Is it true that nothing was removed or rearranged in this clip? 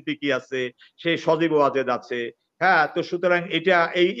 yes; 0 cuts

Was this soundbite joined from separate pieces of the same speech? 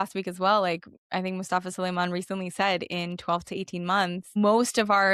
yes; 2 cuts; at 0.9 s, 4.2 s

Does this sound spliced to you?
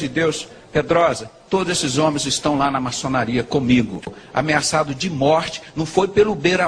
yes; 1 cut; at 4.1 s

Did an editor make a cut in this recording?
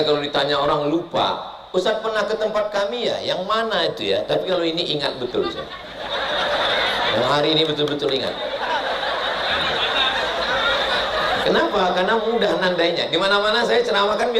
no; 0 cuts

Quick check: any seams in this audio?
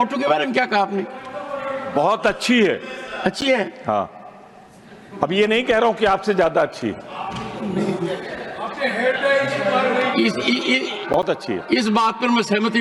no; 0 cuts

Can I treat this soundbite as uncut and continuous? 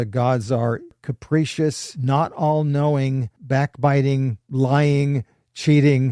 no; 4 cuts; at 1.1 s, 1.9 s, 3.3 s, 4.4 s

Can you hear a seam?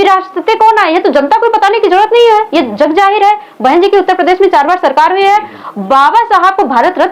no; 0 cuts

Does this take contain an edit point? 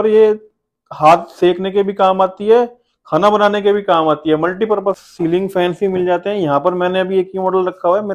yes; 1 cut; at 5.0 s

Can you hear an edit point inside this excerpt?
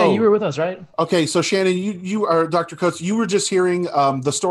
no; 0 cuts

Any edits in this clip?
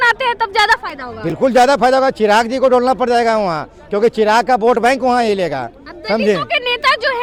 no; 0 cuts

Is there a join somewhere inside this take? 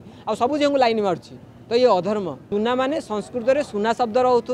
yes; 1 cut; at 2.4 s

